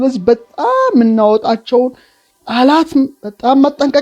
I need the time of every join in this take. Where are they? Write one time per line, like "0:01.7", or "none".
none